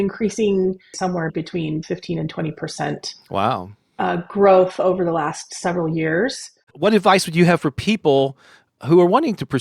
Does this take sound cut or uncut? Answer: cut